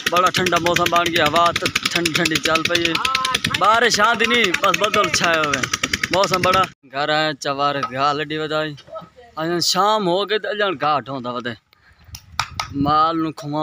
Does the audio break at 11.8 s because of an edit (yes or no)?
no